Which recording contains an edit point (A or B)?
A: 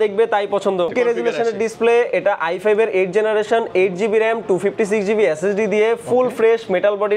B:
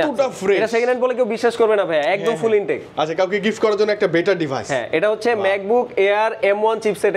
A